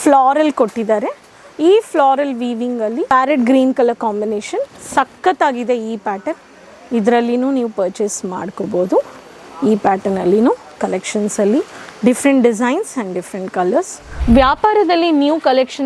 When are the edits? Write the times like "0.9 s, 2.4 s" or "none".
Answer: 3.1 s, 14.0 s